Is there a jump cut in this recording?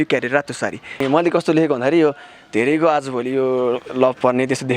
yes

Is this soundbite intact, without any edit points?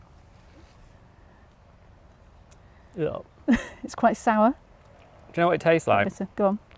yes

